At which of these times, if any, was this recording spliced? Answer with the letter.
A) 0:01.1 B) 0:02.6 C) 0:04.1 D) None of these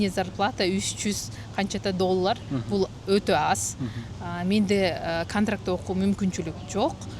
D